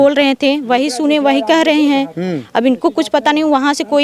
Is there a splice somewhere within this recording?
no; 0 cuts

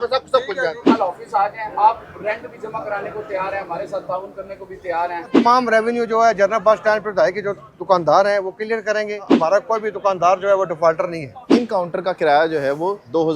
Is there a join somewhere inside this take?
yes; 4 cuts; at 0.8 s, 5.3 s, 9.3 s, 11.4 s

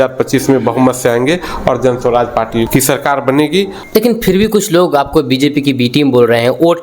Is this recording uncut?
no; 1 cut; at 3.8 s

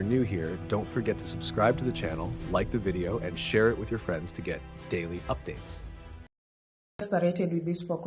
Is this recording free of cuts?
no; 1 cut; at 7.0 s

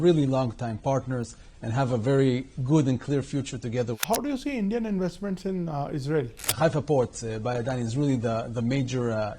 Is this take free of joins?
no; 2 cuts; at 3.9 s, 6.5 s

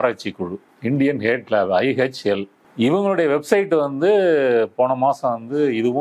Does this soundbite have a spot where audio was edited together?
yes; 1 cut; at 2.6 s

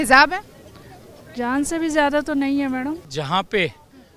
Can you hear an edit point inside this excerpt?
yes; 1 cut; at 3.1 s

